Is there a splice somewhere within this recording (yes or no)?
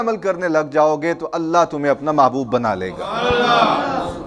no